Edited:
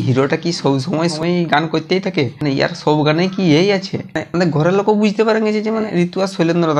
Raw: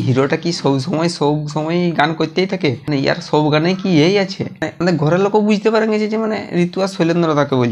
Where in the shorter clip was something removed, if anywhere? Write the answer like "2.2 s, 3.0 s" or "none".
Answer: 1.1 s, 5.9 s

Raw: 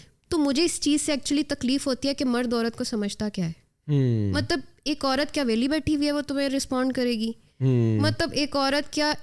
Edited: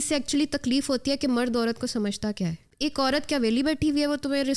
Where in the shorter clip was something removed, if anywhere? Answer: 2.7 s

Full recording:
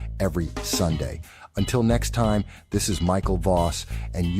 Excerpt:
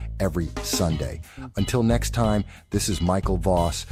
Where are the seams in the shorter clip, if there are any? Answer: none

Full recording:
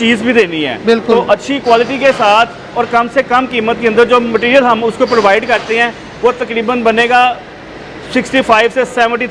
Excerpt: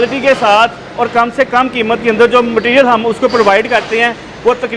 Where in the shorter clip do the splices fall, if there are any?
none

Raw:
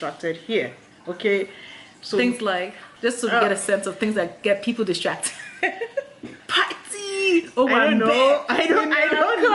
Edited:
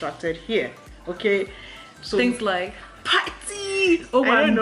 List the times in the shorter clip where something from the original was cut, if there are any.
2.8 s

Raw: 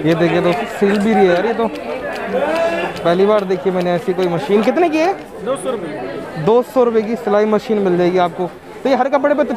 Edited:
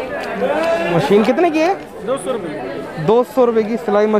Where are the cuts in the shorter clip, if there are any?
0.9 s

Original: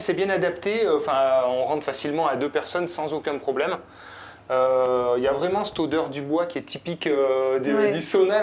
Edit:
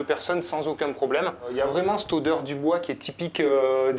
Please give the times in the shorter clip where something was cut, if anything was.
1.5 s

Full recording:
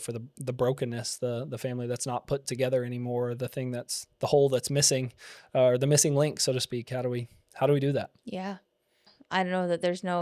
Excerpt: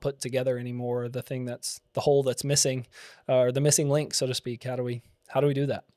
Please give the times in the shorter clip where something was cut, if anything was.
none

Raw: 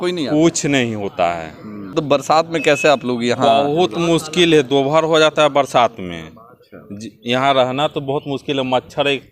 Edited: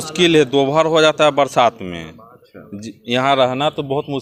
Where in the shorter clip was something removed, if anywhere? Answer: none

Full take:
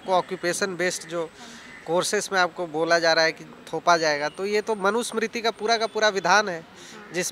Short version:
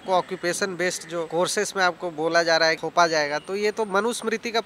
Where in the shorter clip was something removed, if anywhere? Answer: 1.3 s, 2.8 s

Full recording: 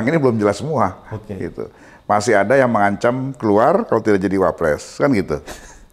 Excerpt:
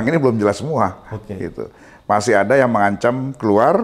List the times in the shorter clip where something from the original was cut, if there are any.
none

